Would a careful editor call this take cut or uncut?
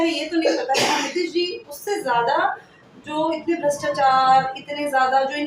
uncut